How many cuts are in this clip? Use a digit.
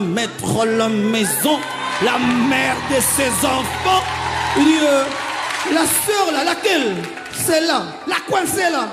0